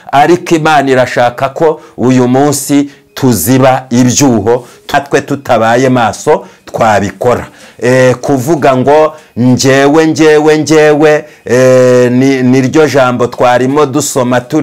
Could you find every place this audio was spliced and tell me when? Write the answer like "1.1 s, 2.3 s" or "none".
4.9 s